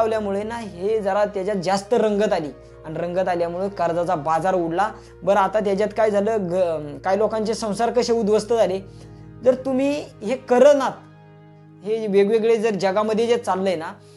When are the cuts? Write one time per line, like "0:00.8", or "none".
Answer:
none